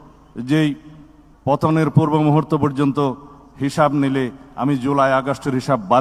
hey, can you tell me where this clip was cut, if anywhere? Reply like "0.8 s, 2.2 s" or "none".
none